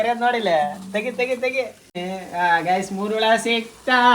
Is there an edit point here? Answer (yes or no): yes